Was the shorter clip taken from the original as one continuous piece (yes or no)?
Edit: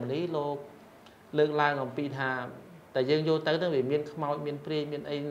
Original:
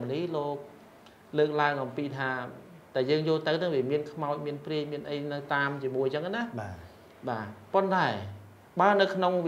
yes